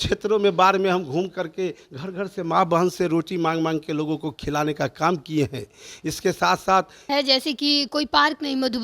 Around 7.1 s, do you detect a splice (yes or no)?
yes